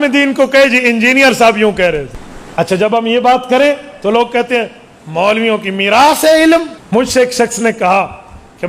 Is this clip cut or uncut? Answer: cut